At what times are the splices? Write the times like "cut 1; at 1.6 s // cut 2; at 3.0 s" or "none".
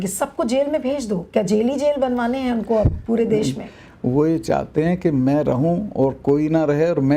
none